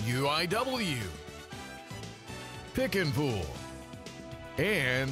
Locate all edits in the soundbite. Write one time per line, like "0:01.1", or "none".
0:01.1